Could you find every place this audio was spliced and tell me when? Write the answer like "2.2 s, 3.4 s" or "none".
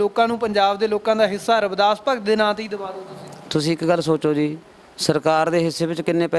none